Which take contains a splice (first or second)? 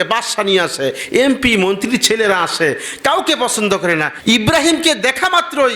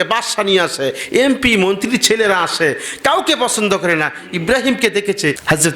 first